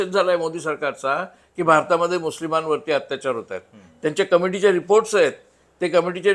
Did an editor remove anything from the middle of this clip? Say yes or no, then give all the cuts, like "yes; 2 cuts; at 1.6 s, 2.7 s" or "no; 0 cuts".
no; 0 cuts